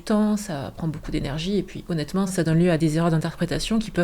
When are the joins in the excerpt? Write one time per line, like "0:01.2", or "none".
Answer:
0:02.8